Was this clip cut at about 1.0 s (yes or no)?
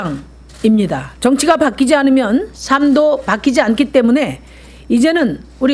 yes